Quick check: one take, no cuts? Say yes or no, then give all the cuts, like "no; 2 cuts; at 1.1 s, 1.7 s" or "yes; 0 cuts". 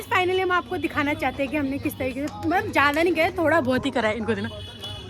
yes; 0 cuts